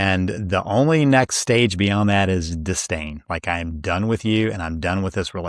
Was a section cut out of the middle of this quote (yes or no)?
no